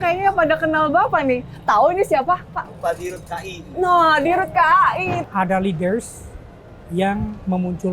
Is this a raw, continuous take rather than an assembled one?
no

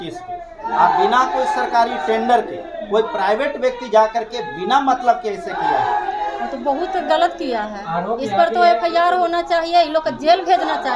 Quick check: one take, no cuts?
yes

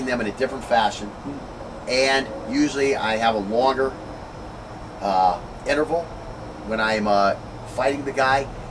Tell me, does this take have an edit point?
yes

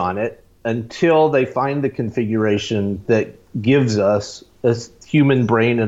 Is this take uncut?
no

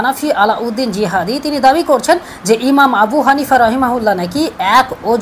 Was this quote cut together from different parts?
no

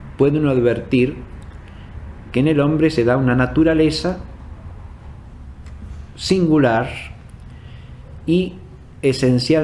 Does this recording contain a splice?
no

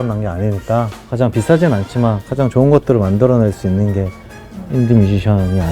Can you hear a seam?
yes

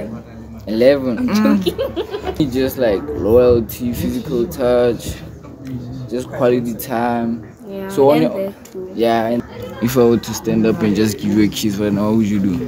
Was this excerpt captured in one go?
no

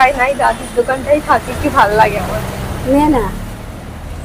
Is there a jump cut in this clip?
no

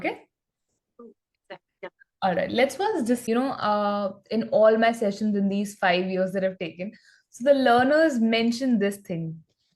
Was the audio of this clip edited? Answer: yes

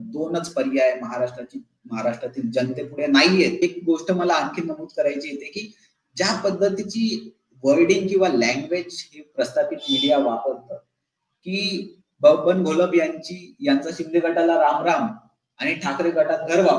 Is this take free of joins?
no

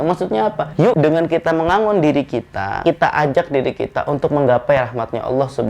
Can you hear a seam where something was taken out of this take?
yes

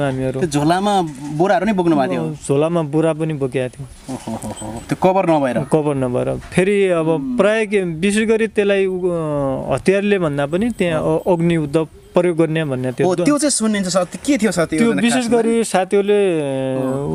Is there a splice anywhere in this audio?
no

